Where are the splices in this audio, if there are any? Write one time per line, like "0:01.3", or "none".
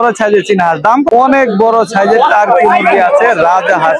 0:01.1